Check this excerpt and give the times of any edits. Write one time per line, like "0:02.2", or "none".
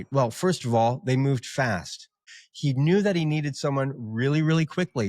0:02.3